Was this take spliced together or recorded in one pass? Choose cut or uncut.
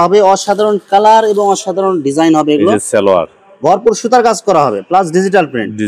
uncut